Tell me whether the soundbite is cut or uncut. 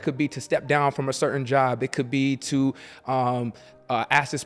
uncut